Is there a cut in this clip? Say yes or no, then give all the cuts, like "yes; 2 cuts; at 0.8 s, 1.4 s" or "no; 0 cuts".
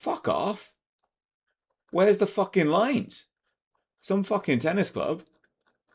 no; 0 cuts